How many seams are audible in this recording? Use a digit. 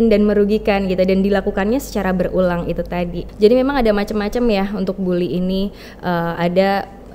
1